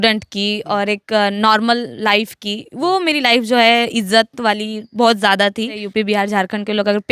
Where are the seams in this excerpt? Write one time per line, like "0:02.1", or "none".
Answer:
0:05.8